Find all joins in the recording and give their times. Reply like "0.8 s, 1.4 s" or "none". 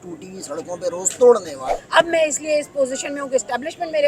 1.7 s